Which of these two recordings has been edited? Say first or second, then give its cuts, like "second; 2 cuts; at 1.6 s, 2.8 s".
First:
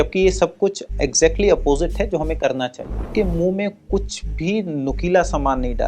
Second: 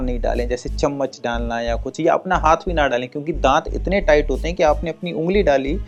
first; 1 cut; at 3.1 s